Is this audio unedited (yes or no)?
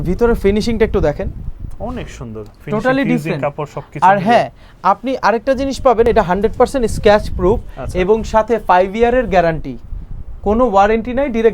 yes